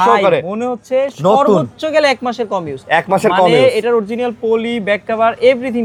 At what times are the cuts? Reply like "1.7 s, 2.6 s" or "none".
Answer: none

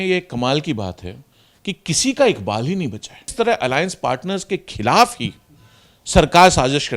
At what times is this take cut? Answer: 3.3 s

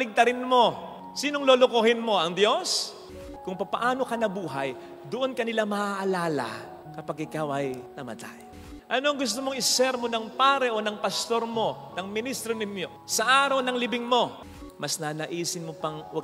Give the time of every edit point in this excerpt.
3.2 s, 8.7 s, 14.6 s

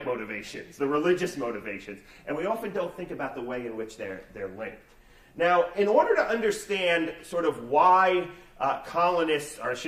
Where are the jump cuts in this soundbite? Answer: 7.1 s

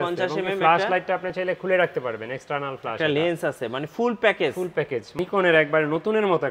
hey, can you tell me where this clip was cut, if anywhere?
5.2 s

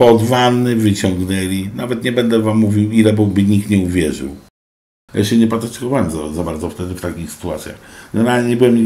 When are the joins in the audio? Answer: 4.8 s

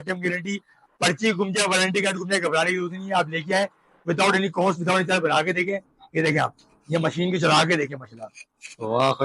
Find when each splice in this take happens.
6.0 s

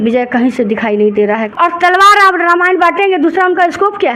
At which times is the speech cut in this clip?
1.5 s

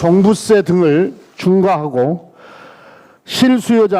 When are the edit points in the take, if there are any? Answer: 1.2 s

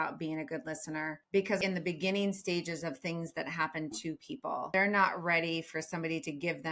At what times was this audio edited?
1.5 s, 4.7 s

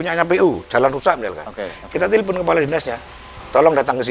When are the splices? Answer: none

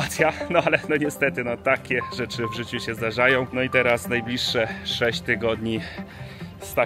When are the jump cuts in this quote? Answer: none

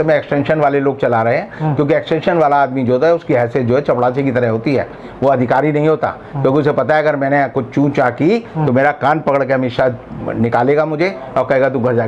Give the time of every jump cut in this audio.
none

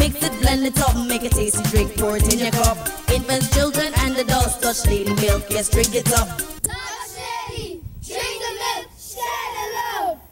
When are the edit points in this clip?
none

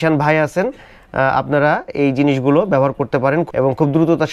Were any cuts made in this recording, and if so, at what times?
none

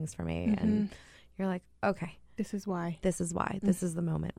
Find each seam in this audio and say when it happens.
none

